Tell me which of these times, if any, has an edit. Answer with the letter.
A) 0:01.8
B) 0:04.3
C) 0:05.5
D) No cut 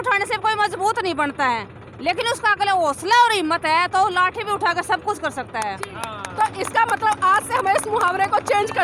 D